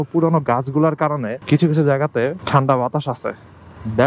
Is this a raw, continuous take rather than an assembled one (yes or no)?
no